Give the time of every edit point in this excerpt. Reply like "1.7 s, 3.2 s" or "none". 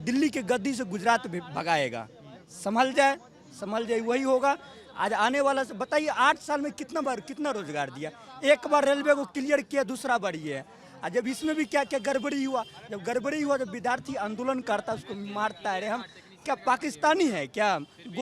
none